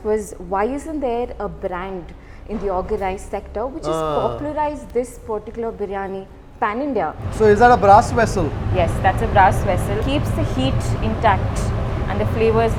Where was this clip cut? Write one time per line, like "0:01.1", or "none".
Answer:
0:07.2